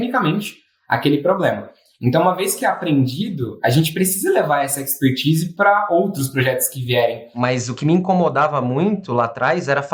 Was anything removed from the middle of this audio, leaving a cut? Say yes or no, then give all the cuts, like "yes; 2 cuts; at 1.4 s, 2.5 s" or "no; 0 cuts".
yes; 1 cut; at 7.2 s